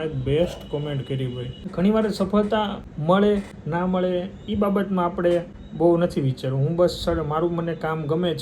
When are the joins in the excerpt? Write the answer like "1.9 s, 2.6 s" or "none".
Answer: 1.6 s, 2.9 s, 3.6 s, 5.6 s